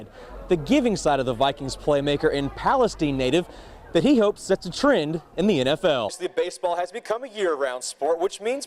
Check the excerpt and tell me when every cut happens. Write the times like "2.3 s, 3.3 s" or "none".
6.1 s